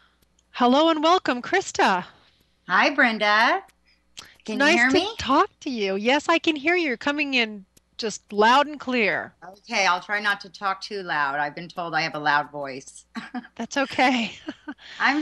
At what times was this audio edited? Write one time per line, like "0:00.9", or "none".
0:11.8